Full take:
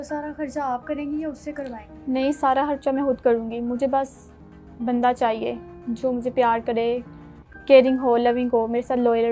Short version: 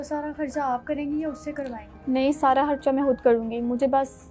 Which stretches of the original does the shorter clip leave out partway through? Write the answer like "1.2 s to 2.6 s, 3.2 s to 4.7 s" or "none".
none